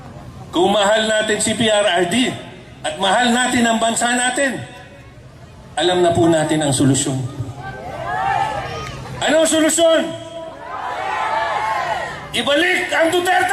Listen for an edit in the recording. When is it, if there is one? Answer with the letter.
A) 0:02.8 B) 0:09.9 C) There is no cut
C